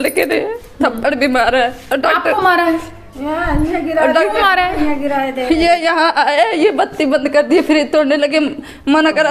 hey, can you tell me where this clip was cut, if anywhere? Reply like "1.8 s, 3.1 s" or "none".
none